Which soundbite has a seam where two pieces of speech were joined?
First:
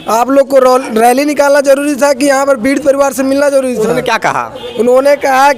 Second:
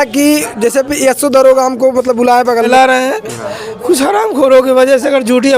second; 1 cut; at 2.7 s

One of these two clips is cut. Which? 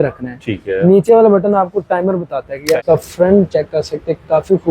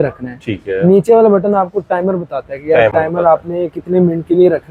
first; 1 cut; at 2.8 s

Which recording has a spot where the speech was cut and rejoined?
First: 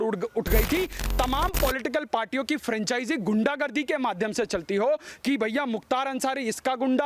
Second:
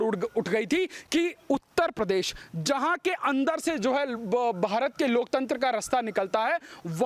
first; 1 cut; at 1.0 s

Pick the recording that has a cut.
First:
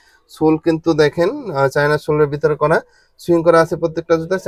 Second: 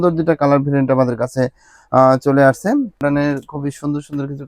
second; 1 cut; at 3.0 s

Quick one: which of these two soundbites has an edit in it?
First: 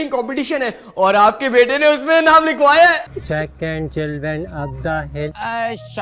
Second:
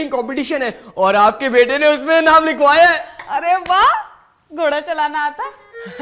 first; 1 cut; at 3.1 s

